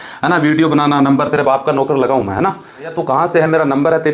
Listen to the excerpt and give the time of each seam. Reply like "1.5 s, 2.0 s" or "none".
3.0 s